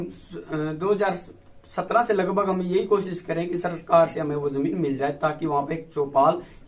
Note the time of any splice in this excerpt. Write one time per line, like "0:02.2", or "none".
none